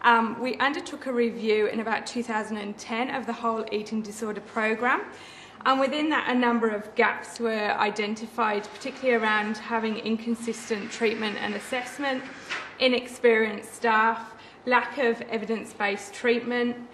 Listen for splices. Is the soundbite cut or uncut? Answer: cut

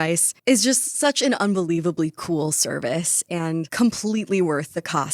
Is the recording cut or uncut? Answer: uncut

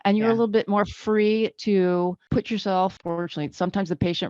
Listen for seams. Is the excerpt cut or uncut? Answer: cut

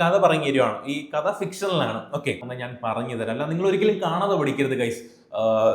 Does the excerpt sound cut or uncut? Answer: cut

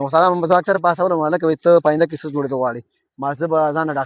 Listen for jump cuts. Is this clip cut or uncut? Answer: uncut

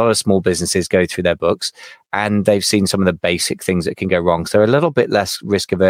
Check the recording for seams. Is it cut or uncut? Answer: uncut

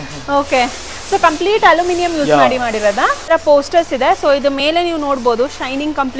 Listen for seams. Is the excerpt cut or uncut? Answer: cut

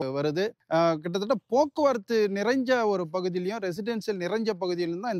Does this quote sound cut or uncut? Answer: uncut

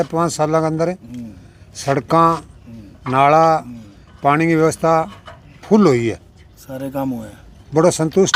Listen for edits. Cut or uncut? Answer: uncut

